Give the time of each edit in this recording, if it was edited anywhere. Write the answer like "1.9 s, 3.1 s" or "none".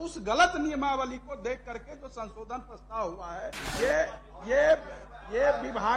3.6 s

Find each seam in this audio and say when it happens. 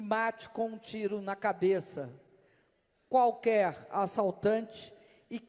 none

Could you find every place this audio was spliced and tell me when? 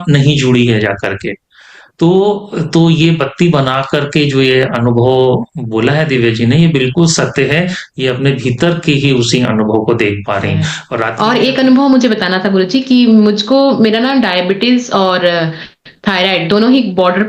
11.1 s

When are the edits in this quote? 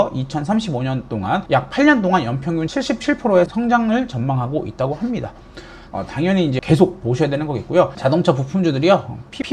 5.7 s, 7.9 s

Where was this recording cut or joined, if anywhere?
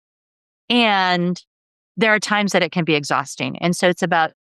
none

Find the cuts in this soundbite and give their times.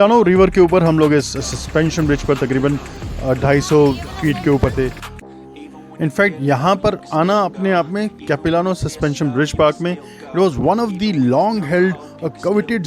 5.0 s

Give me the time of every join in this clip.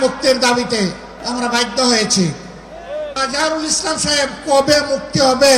1.1 s, 3.2 s

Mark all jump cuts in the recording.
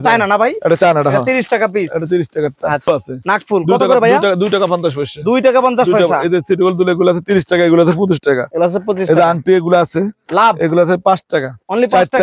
2.9 s

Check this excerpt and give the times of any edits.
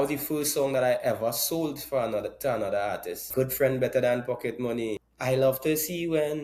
3.3 s, 5.1 s

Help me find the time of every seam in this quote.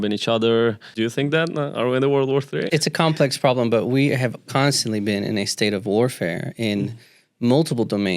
0.9 s, 2.7 s

